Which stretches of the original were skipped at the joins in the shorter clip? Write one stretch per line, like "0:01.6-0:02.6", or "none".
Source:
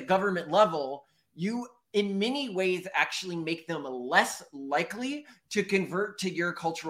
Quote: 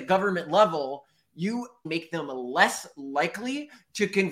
0:01.9-0:03.4